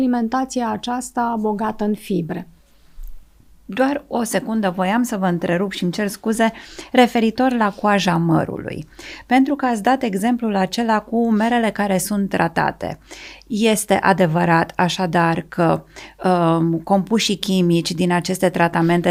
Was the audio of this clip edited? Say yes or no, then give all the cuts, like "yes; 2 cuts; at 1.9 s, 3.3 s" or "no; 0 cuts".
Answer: no; 0 cuts